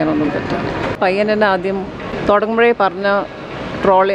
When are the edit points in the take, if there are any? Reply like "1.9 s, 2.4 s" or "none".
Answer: 1.0 s, 2.1 s